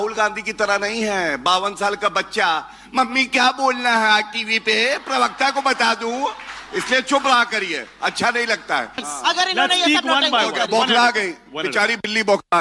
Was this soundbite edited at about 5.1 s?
no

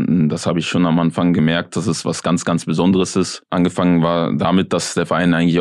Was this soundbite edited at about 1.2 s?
no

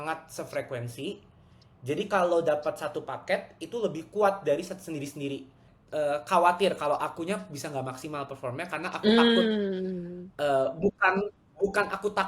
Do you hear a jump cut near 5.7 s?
yes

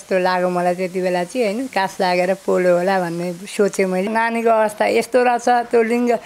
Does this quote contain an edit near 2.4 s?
no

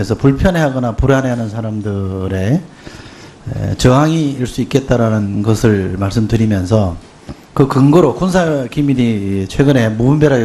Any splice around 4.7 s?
yes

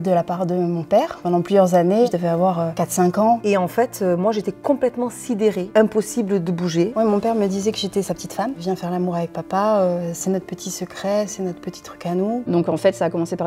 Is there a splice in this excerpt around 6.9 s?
yes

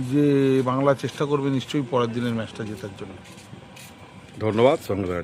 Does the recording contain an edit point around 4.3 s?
no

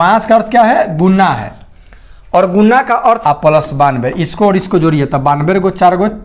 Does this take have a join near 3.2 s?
yes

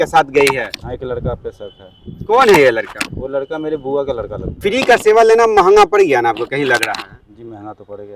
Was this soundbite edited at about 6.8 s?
no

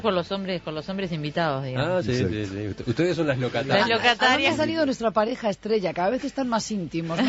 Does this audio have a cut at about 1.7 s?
yes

